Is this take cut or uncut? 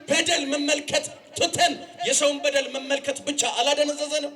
uncut